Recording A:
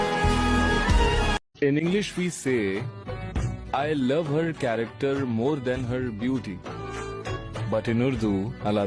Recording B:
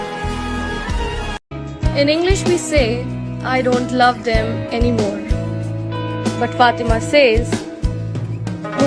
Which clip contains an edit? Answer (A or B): A